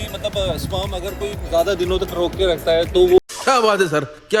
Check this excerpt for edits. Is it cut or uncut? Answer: uncut